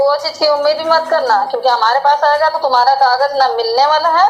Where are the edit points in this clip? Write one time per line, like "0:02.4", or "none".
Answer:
none